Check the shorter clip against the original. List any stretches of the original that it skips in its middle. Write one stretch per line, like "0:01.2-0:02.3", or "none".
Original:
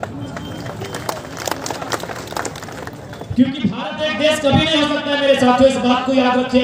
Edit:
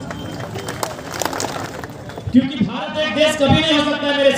0:01.9-0:02.7